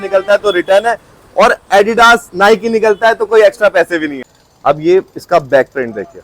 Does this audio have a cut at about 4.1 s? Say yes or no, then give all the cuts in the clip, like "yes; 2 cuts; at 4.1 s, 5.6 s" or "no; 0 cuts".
yes; 1 cut; at 4.1 s